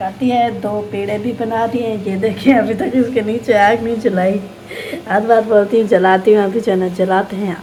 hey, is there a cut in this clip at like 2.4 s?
no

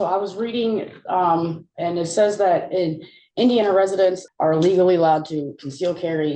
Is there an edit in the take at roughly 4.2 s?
yes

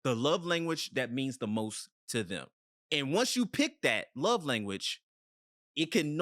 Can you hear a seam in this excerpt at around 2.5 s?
yes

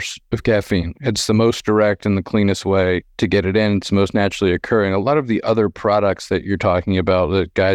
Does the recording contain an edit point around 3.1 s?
yes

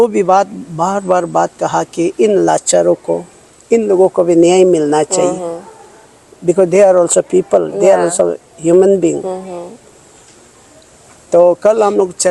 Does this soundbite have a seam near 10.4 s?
no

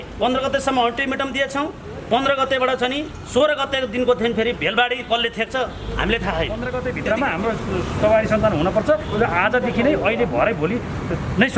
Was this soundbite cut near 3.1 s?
no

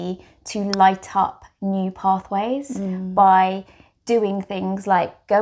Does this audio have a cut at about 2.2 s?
no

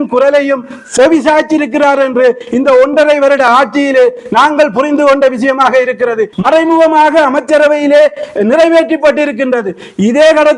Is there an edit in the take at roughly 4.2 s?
no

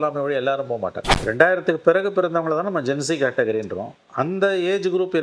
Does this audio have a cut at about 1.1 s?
yes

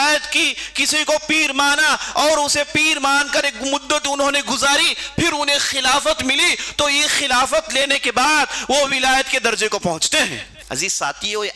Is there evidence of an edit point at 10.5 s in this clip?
yes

